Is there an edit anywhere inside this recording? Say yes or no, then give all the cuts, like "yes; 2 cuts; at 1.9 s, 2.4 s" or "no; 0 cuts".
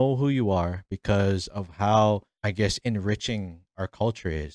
yes; 1 cut; at 2.3 s